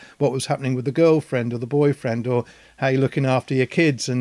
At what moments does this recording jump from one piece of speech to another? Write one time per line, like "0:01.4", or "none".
none

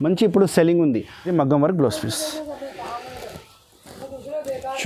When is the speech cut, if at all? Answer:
0:01.2

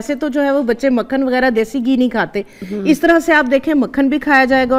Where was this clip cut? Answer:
none

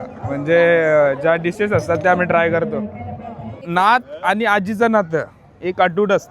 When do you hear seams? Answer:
0:03.5

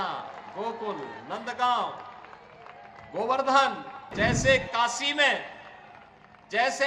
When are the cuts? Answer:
0:04.0

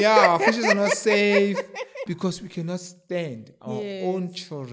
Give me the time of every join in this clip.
0:02.0

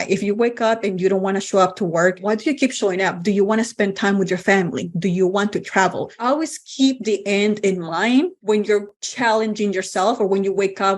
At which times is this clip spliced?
0:02.2
0:06.2
0:08.6

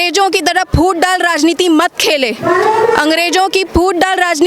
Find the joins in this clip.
none

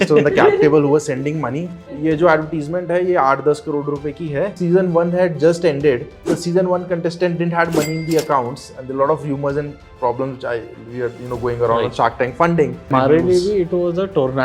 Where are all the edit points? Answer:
0:01.9
0:04.6
0:06.1
0:12.9

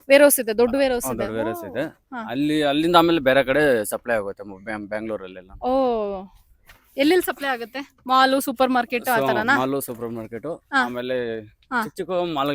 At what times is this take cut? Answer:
none

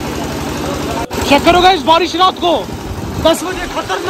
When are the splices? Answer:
0:01.1

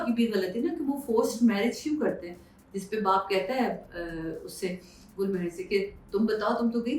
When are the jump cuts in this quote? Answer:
none

